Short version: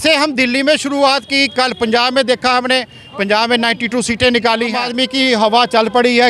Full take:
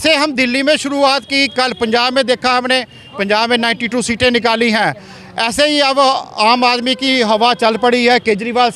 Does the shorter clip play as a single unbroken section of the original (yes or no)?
no